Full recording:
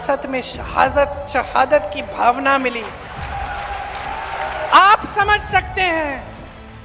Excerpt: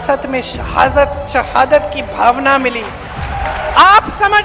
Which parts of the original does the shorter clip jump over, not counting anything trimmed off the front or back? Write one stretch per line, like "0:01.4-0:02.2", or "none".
0:03.5-0:04.4

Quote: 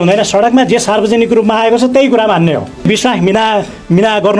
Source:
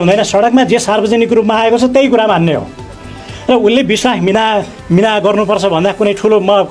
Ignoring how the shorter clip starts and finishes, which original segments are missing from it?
0:02.9-0:03.9

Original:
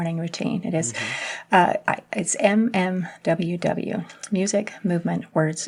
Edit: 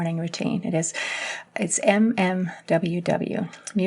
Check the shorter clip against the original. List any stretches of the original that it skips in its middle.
0:01.4-0:02.0

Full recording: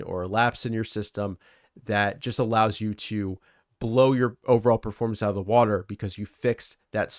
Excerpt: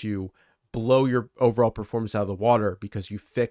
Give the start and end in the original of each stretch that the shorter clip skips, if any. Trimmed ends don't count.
none

